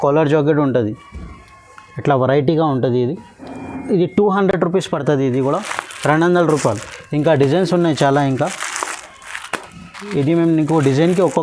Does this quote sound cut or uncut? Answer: uncut